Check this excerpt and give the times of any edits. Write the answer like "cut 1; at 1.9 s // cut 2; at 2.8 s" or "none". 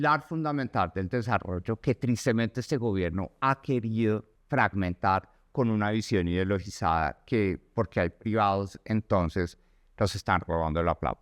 cut 1; at 4.3 s